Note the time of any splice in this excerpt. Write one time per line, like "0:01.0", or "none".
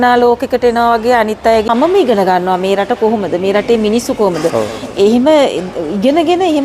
0:01.7

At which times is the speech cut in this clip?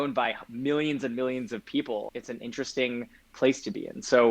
0:02.2

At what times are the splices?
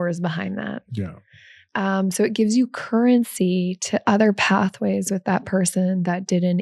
none

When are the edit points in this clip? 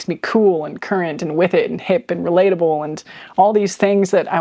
none

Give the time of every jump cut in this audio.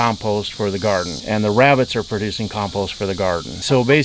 none

